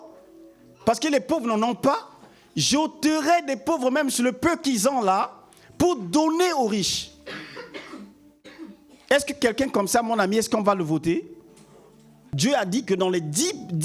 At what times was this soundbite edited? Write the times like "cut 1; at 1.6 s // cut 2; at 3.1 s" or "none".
cut 1; at 12.2 s

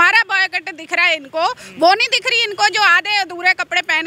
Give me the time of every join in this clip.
none

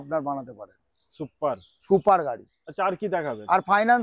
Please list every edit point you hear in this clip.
none

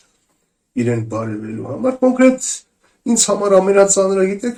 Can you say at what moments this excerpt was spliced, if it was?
none

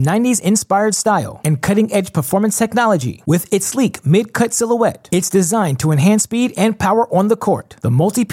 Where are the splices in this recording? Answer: none

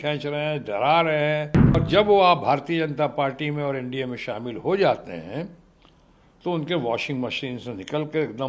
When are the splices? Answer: cut 1; at 1.8 s

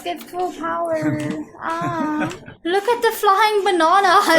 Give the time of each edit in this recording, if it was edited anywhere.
cut 1; at 2.5 s

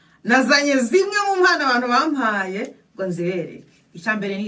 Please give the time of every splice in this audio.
none

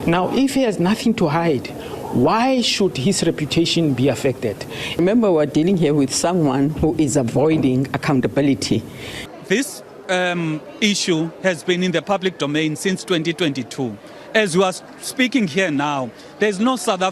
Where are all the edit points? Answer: cut 1; at 5.0 s // cut 2; at 9.3 s

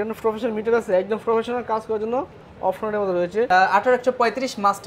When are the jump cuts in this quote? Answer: cut 1; at 3.5 s

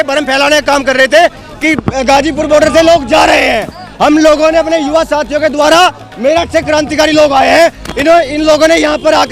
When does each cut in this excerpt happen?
none

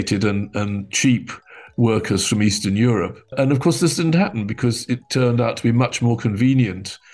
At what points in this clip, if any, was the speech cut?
cut 1; at 3.3 s

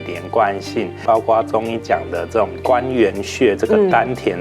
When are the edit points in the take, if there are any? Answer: cut 1; at 1.0 s

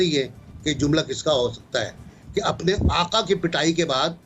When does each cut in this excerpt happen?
none

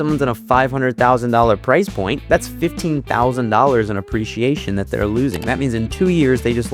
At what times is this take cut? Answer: none

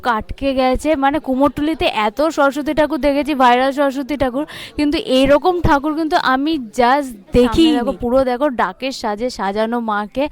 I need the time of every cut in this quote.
cut 1; at 7.9 s

